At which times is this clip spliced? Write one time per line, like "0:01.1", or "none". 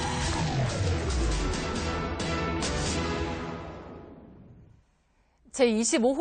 0:00.9